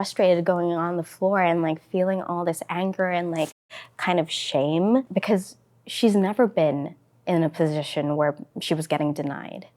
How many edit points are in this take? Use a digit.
0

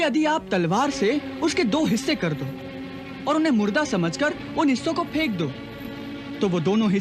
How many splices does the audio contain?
0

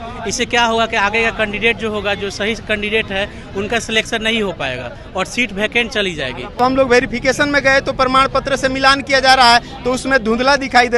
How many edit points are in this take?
1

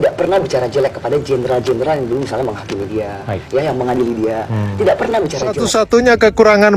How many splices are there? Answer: 1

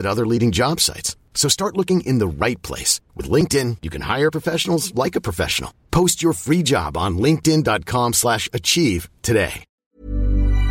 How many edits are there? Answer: 1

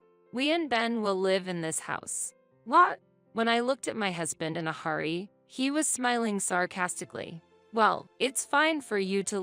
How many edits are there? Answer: 1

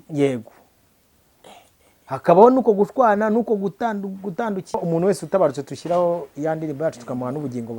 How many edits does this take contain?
1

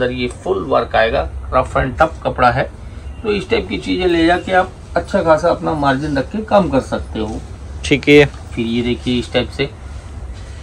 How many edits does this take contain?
0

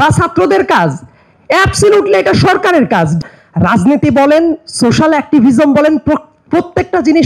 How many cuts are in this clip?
1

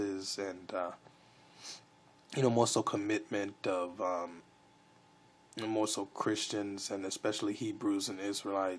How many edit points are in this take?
0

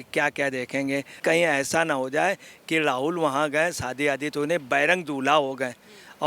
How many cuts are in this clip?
1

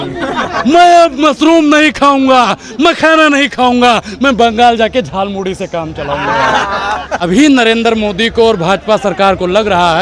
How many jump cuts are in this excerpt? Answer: 1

